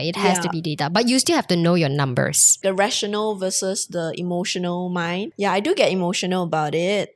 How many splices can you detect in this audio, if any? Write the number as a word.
two